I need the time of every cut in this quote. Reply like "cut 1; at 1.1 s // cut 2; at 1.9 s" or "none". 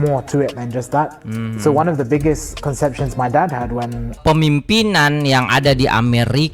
cut 1; at 4.2 s